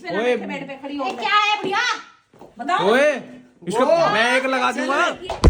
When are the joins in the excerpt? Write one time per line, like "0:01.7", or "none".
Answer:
none